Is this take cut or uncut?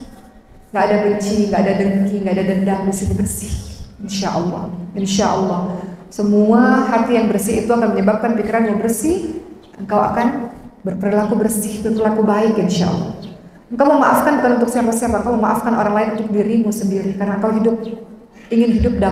uncut